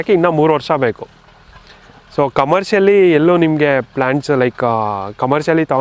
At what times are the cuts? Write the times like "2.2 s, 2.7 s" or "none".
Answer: none